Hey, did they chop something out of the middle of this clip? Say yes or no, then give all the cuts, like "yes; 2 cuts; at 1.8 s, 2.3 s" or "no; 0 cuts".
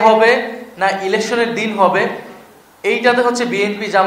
no; 0 cuts